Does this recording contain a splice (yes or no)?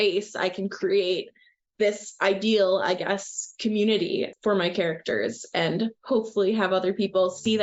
no